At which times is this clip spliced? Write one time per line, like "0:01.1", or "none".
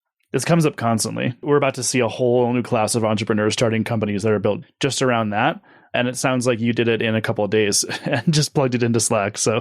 0:01.4